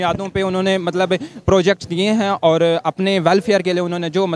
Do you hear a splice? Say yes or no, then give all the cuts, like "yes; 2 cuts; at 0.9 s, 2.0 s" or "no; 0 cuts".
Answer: no; 0 cuts